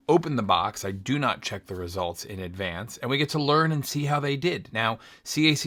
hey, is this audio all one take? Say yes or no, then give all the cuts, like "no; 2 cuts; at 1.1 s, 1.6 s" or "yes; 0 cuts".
yes; 0 cuts